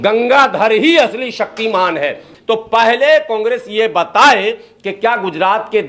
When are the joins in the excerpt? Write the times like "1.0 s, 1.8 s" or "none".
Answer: 2.3 s